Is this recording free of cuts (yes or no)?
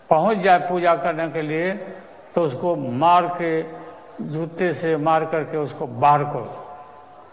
yes